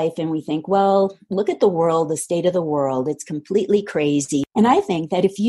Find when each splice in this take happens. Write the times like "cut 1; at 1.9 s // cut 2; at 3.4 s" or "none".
cut 1; at 4.4 s